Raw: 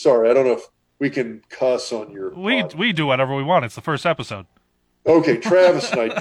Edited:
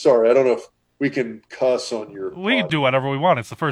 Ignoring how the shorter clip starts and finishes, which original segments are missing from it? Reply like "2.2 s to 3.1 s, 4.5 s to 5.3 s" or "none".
2.7 s to 3.0 s